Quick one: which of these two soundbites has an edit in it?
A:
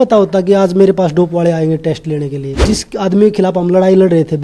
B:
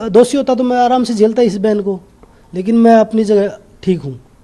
A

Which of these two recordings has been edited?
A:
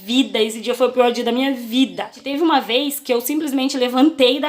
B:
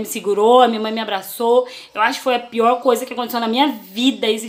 A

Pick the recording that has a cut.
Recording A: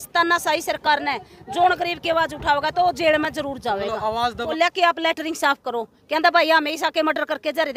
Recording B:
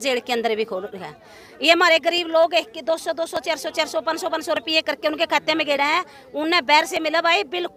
A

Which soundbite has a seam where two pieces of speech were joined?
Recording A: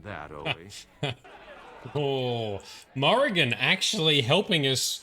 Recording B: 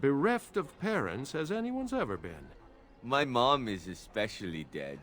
A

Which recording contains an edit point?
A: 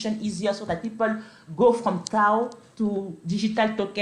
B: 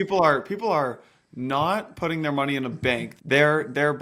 B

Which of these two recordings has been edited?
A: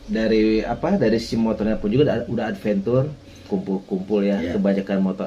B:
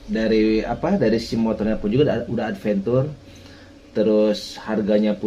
A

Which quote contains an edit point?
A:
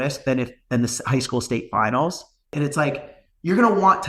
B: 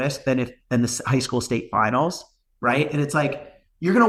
A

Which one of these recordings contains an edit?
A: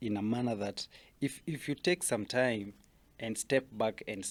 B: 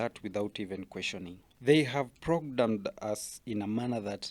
B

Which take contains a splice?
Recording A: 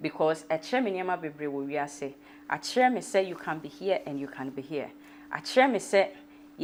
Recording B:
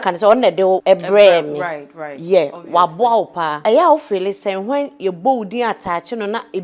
B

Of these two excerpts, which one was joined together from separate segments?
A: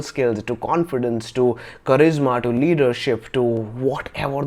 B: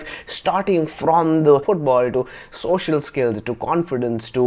B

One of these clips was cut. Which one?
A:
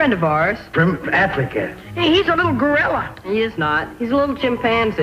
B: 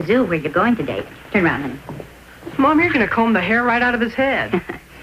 B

